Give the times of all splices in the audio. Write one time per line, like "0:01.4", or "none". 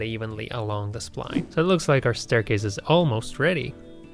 0:01.4